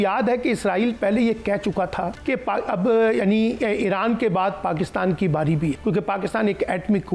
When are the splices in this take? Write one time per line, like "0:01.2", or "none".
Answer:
0:02.2
0:05.8